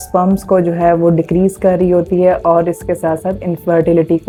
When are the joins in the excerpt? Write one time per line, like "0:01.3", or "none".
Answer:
none